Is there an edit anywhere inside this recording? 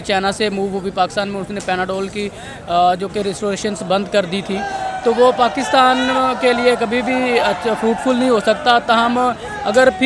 no; 0 cuts

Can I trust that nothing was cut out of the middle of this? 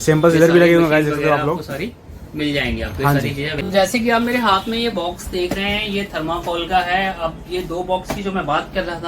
no; 1 cut; at 3.5 s

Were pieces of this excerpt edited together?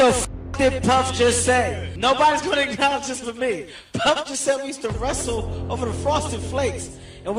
yes; 1 cut; at 1.8 s

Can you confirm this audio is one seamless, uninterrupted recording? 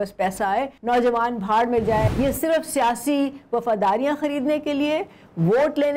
no; 1 cut; at 2.1 s

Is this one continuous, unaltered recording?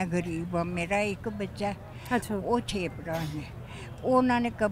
yes; 0 cuts

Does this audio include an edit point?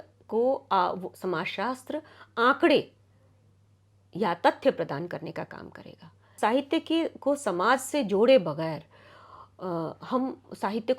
yes; 1 cut; at 6.3 s

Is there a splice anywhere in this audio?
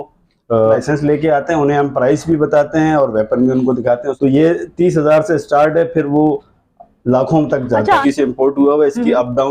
yes; 3 cuts; at 0.8 s, 4.1 s, 8.0 s

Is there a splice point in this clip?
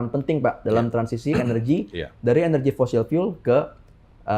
no; 0 cuts

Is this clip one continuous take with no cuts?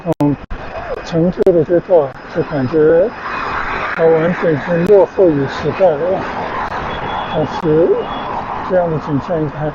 yes; 0 cuts

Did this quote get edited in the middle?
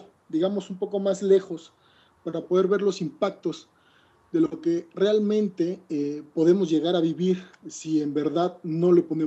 yes; 1 cut; at 4.6 s

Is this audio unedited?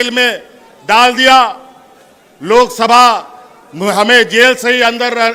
yes; 0 cuts

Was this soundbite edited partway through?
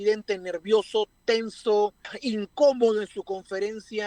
yes; 1 cut; at 2.1 s

